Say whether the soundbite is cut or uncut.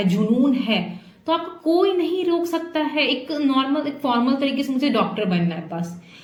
uncut